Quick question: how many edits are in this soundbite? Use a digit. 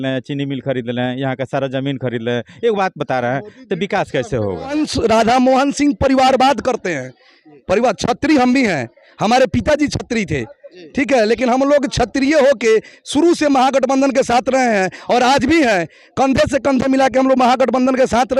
1